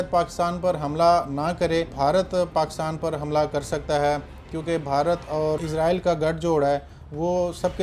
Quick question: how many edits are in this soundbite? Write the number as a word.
two